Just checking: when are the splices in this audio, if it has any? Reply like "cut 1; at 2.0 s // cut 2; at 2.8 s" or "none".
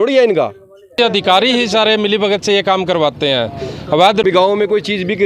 cut 1; at 1.0 s // cut 2; at 4.2 s